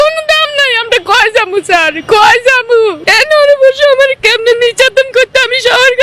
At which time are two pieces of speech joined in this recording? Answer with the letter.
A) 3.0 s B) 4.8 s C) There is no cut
A